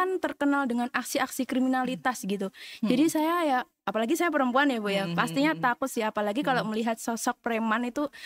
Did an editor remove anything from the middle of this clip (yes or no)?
no